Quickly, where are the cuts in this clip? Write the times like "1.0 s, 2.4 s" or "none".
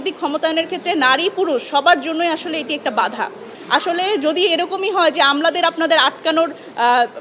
3.5 s